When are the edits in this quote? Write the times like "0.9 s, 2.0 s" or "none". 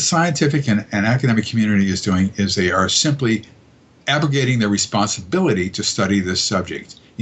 none